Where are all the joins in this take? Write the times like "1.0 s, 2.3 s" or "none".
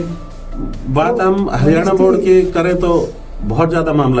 none

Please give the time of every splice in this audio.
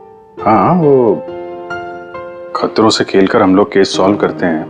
none

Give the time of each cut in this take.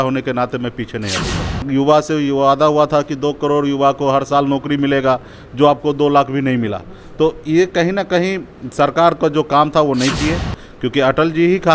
1.6 s, 10.6 s

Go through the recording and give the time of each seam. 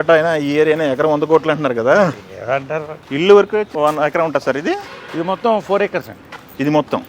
3.0 s

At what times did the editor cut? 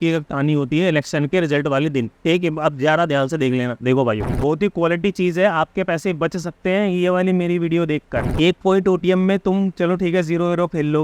4.3 s, 8.2 s

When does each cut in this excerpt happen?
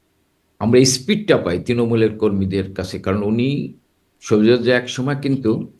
none

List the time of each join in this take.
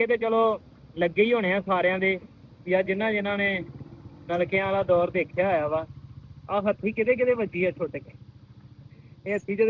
none

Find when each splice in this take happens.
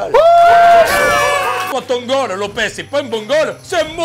1.8 s

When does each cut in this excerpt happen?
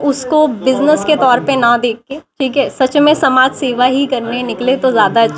none

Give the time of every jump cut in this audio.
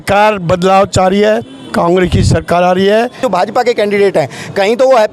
3.2 s

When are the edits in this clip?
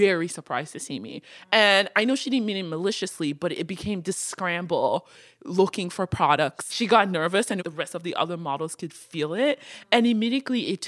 7.6 s

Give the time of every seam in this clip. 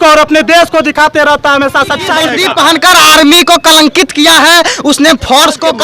2.3 s

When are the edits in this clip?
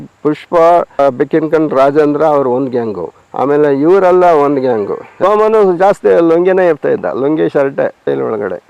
1.0 s, 5.1 s

